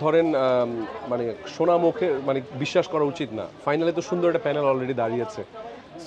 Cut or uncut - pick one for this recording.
uncut